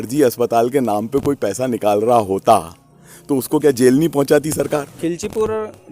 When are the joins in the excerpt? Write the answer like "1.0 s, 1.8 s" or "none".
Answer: 4.9 s

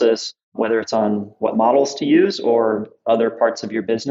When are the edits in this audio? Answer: 1.4 s, 3.0 s

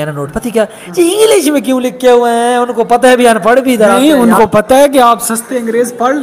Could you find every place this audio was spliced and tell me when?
none

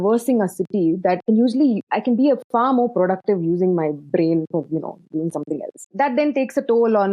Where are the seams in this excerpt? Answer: 1.2 s, 1.9 s, 5.9 s

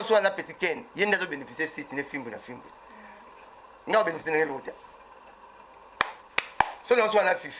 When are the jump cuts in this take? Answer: none

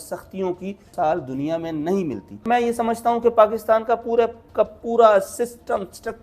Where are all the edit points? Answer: 0.9 s, 2.4 s

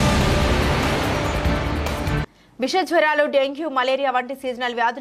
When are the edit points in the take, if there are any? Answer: 2.1 s

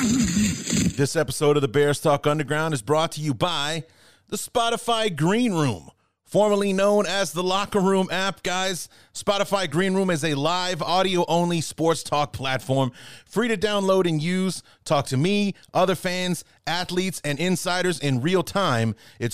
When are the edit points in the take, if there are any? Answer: 0.9 s

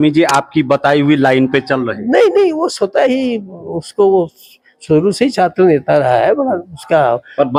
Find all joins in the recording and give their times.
none

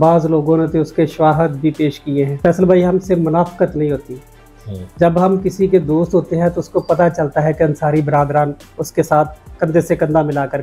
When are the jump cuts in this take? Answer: 2.4 s

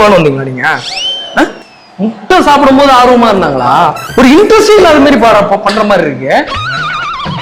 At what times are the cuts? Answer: 1.6 s

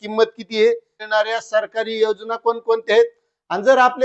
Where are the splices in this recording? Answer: 1.0 s

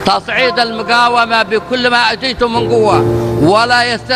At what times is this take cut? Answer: 3.0 s

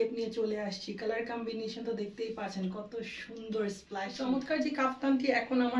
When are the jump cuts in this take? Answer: 4.1 s

